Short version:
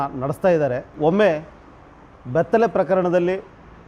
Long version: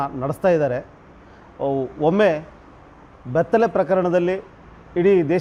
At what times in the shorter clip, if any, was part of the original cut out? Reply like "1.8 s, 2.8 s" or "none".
0.9 s